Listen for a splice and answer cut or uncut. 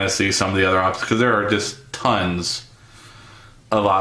uncut